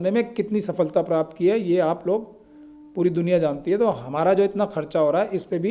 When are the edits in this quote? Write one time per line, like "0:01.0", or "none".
none